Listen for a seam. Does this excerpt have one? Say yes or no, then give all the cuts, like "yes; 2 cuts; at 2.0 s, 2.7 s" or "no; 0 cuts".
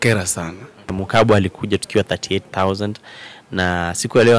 yes; 1 cut; at 1.0 s